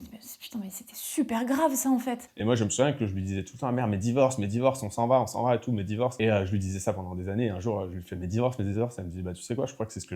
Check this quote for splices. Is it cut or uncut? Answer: cut